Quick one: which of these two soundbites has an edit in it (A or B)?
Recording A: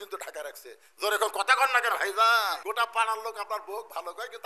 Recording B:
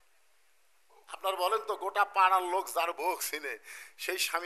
A